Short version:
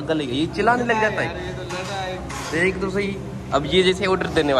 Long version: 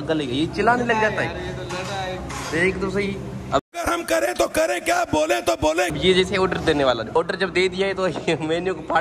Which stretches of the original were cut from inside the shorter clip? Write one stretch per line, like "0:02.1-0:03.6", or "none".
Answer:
0:03.7-0:06.0